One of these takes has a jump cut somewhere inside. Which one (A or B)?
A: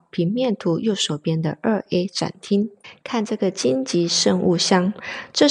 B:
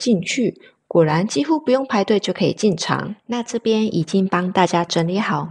B